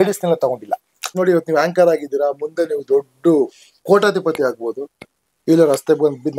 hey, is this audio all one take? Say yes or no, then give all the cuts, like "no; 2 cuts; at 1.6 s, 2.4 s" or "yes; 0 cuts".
no; 1 cut; at 1.1 s